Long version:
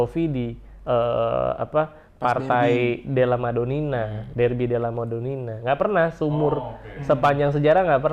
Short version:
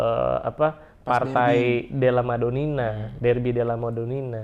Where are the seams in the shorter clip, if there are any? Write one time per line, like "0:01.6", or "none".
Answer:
none